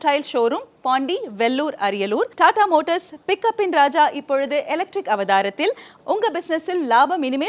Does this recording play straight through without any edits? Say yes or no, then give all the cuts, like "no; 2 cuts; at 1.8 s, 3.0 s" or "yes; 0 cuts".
yes; 0 cuts